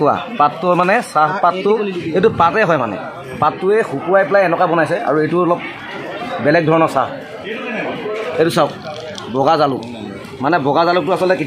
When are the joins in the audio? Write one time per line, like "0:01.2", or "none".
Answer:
0:08.3